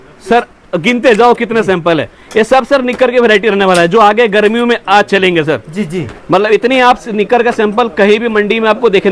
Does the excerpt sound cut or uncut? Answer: uncut